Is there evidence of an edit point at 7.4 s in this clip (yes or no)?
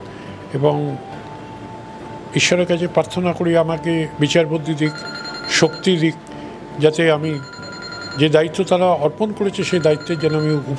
no